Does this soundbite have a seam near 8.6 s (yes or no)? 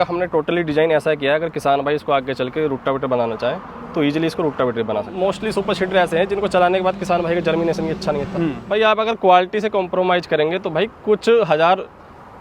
yes